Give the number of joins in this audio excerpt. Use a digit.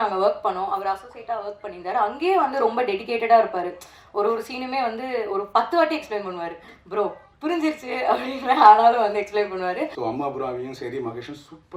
1